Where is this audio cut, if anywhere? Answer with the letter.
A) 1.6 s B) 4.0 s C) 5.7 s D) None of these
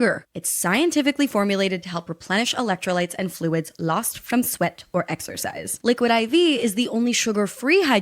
C